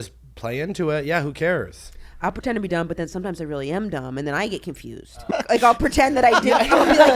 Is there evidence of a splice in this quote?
yes; 1 cut; at 5.2 s

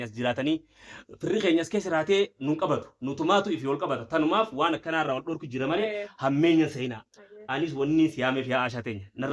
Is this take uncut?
yes; 0 cuts

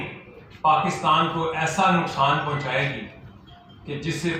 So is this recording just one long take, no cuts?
yes; 0 cuts

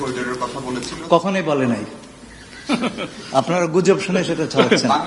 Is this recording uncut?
yes; 0 cuts

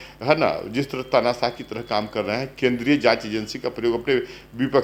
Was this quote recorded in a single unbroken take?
yes; 0 cuts

